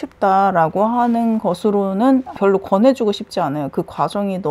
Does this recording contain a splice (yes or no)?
yes